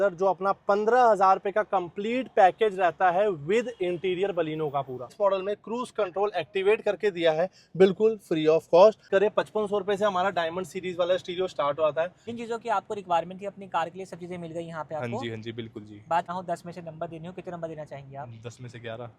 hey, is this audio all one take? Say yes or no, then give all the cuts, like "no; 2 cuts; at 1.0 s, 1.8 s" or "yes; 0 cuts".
no; 4 cuts; at 5.1 s, 9.1 s, 12.2 s, 16.3 s